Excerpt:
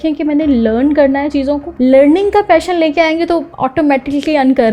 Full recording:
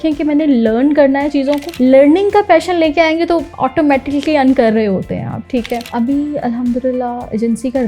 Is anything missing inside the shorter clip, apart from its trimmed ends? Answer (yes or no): no